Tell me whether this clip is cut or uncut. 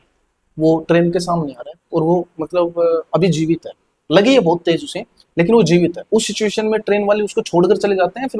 uncut